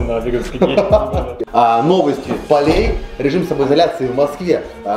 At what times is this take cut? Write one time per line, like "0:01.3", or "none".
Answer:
0:01.4
0:02.4